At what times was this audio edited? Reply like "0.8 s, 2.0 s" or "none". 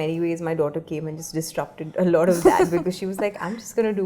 none